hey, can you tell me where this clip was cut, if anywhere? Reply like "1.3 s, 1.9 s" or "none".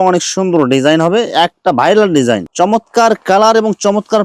2.4 s